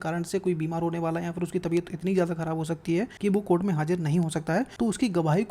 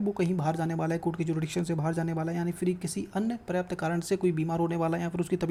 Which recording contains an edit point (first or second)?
first